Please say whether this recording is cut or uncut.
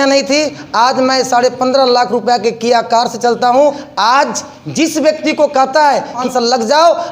uncut